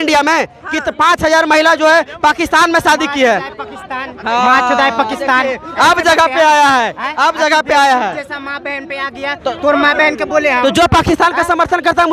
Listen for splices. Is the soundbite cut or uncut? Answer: uncut